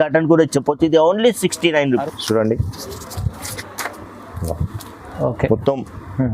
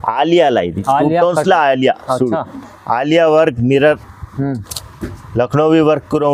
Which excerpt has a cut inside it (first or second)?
first